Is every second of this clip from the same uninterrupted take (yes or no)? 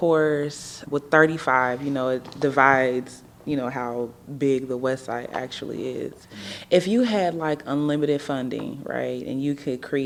yes